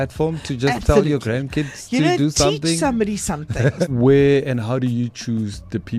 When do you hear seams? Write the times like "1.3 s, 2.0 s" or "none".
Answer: 3.8 s